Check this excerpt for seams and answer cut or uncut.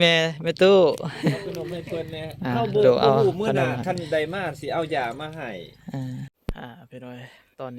cut